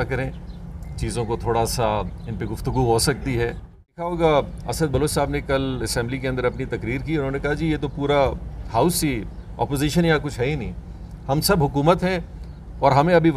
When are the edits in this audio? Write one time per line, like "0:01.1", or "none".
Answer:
0:04.1